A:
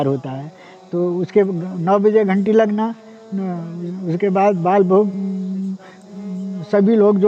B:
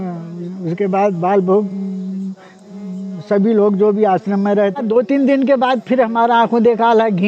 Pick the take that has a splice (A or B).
B